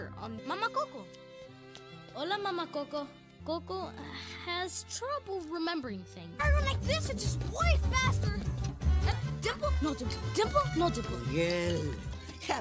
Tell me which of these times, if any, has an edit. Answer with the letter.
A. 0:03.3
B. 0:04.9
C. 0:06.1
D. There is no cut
A